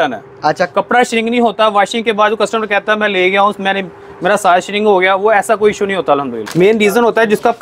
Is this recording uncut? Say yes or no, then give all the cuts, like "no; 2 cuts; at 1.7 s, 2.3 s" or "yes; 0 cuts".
no; 1 cut; at 6.4 s